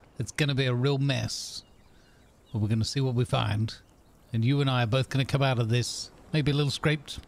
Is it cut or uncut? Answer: uncut